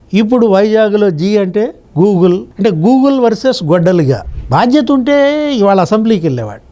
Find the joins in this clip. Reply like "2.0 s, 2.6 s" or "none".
4.3 s

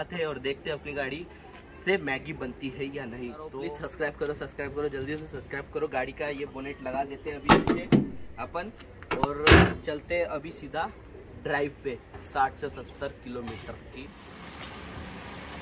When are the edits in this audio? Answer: 3.6 s, 14.2 s

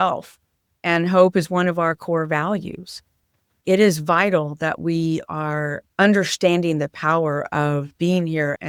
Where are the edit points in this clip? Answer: none

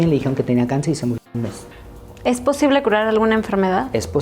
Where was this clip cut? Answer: 1.6 s

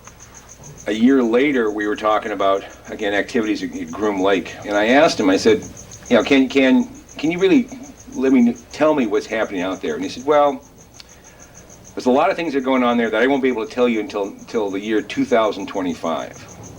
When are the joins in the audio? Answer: 4.8 s

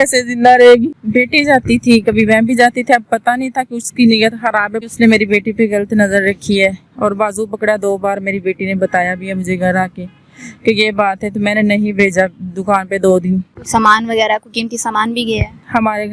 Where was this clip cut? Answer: 1.0 s, 4.8 s, 13.5 s

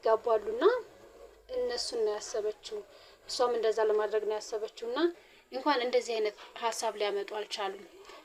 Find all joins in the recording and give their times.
5.3 s

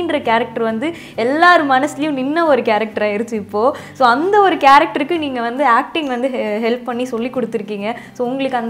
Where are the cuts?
none

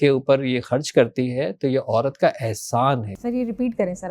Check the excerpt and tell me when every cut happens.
3.1 s

